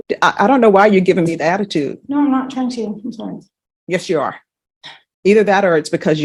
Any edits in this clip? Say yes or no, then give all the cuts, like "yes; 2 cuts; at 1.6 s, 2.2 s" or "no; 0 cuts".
no; 0 cuts